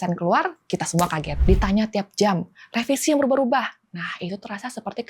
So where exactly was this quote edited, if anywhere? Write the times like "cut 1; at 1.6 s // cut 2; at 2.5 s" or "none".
cut 1; at 1.3 s

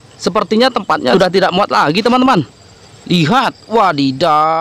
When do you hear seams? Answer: cut 1; at 1.1 s

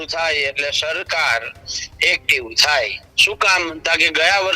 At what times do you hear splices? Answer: cut 1; at 3.1 s

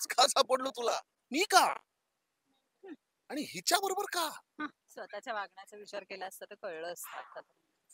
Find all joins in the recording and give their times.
cut 1; at 1.1 s

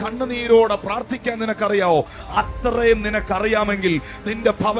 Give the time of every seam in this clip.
none

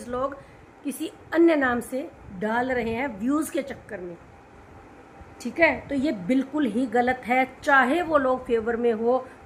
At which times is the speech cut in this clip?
none

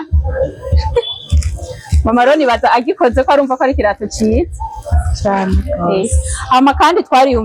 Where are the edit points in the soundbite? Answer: none

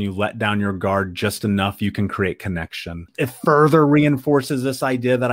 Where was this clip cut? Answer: cut 1; at 3.1 s

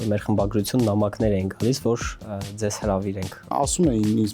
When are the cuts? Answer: cut 1; at 2.1 s // cut 2; at 3.5 s

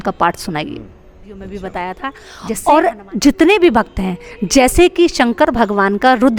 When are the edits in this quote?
cut 1; at 1.4 s

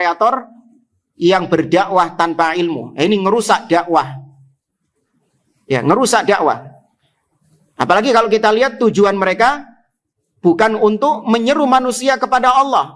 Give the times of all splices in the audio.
none

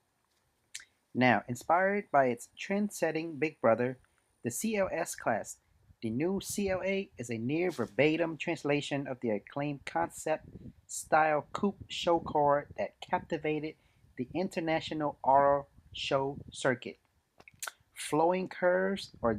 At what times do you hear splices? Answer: none

